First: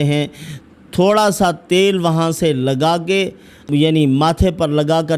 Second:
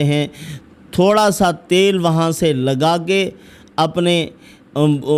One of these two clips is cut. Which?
first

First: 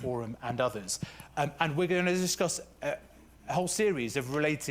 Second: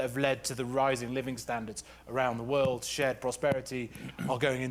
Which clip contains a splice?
first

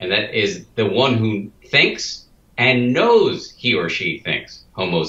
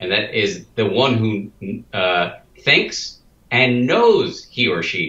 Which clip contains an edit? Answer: first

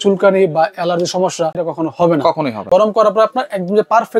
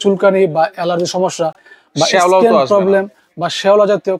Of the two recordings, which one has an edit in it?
first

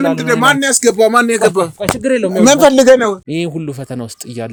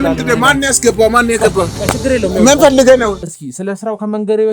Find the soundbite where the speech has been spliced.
second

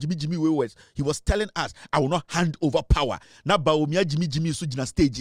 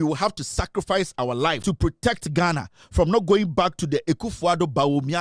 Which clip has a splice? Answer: second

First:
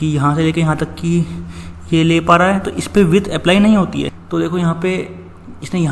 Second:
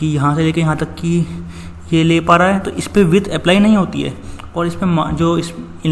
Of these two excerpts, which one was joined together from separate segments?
first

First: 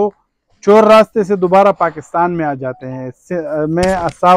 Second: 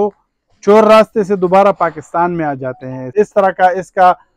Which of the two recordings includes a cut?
second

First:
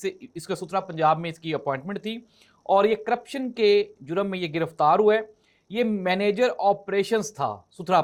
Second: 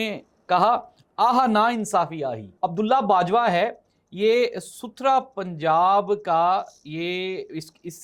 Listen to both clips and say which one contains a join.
second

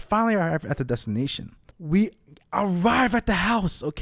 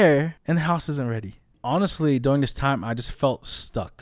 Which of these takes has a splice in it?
second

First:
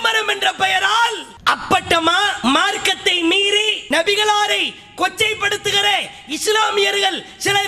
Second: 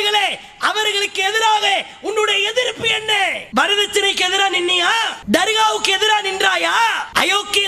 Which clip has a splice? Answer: first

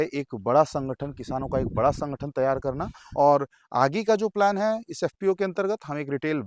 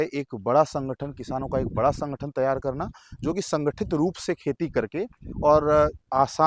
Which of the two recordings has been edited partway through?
first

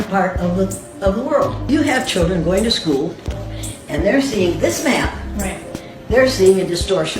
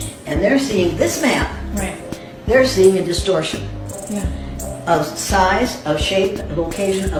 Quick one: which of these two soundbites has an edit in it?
first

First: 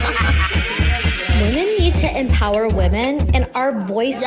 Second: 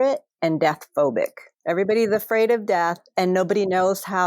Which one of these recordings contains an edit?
second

